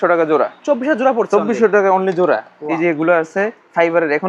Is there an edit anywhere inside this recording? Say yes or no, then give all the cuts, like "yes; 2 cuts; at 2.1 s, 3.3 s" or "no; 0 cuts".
yes; 1 cut; at 2.7 s